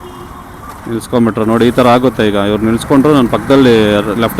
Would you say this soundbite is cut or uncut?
uncut